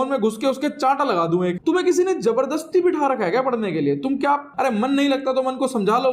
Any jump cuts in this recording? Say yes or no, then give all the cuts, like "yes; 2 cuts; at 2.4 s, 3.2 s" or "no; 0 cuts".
yes; 2 cuts; at 1.6 s, 4.5 s